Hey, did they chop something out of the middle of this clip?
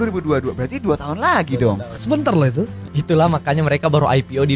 yes; 2 cuts; at 1.9 s, 2.8 s

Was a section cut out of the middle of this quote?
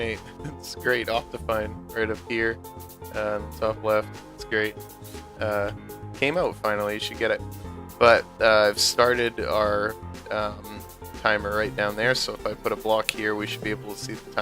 yes; 1 cut; at 5.2 s

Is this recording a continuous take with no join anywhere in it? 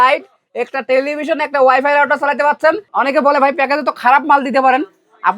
no; 1 cut; at 2.8 s

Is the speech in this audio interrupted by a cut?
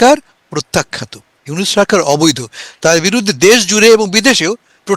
no; 0 cuts

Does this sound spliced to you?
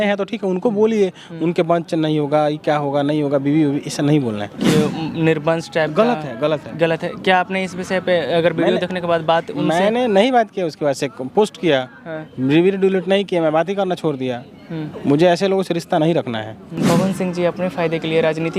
yes; 2 cuts; at 4.6 s, 16.8 s

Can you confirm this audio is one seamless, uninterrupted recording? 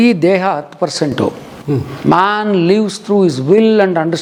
yes; 0 cuts

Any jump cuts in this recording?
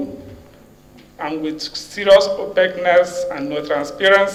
no; 0 cuts

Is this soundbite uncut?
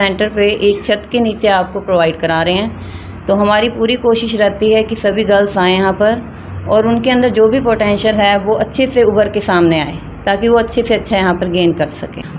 yes; 0 cuts

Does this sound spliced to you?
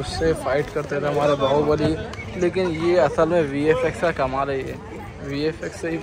no; 0 cuts

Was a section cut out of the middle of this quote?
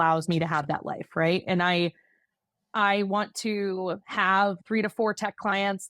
no; 0 cuts

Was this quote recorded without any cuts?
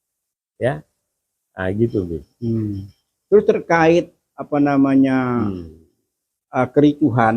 yes; 0 cuts

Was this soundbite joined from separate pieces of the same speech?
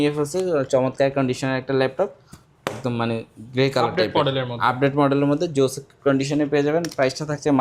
no; 0 cuts

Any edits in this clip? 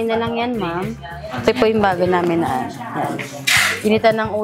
yes; 1 cut; at 1.4 s

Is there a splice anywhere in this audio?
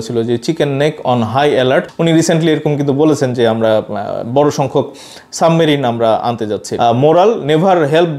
yes; 2 cuts; at 1.9 s, 6.6 s

